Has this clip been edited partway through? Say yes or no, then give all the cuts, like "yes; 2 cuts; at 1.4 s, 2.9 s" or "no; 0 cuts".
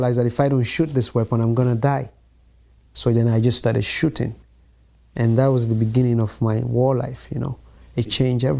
no; 0 cuts